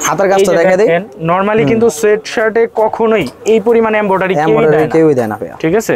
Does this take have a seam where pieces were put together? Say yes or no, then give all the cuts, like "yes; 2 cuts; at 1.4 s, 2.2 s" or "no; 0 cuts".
no; 0 cuts